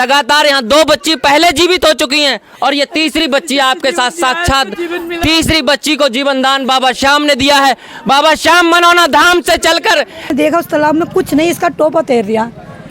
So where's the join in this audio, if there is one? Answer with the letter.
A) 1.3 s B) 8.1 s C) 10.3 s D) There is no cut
C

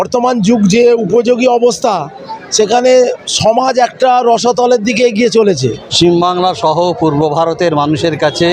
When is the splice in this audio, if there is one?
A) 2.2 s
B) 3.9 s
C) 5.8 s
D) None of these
C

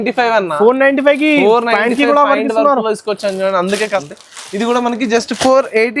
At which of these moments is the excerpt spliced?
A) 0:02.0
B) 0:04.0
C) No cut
B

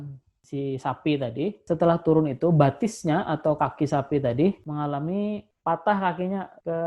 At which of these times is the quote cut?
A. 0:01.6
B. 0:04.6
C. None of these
A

